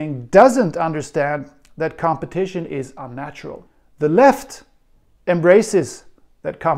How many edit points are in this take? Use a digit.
1